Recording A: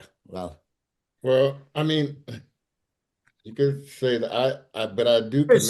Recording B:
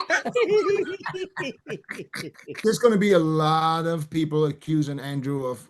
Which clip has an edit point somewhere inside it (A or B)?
B